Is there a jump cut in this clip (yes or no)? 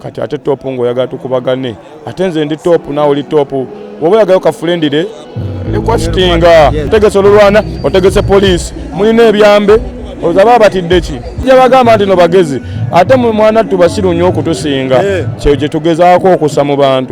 yes